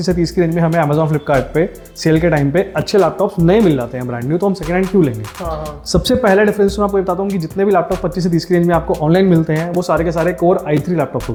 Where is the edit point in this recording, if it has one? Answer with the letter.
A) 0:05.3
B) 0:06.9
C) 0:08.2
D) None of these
D